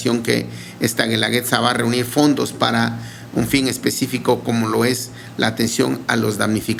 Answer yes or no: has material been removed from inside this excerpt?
no